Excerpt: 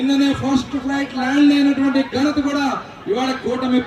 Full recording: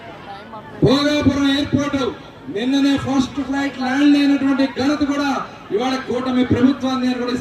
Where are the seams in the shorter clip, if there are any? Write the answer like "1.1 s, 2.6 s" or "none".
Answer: none